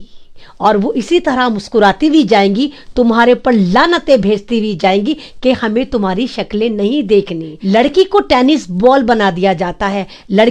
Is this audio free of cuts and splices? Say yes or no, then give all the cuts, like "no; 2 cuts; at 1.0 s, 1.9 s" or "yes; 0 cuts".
no; 1 cut; at 7.5 s